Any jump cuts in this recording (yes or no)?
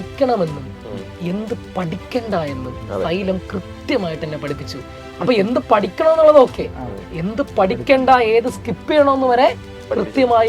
no